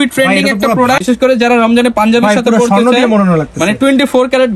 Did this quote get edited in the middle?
yes; 1 cut; at 1.0 s

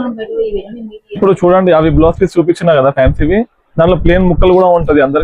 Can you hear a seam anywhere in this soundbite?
yes; 1 cut; at 1.0 s

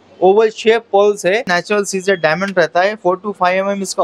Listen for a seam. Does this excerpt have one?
yes; 1 cut; at 1.5 s

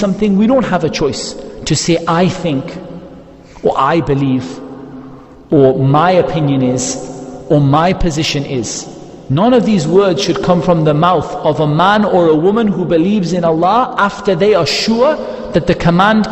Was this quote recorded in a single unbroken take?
yes; 0 cuts

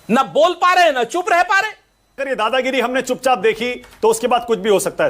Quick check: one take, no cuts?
no; 1 cut; at 2.3 s

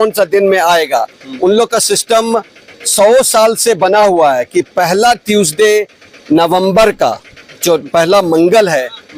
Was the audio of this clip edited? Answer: no; 0 cuts

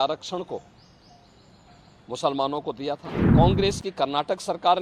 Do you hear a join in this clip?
yes; 1 cut; at 3.2 s

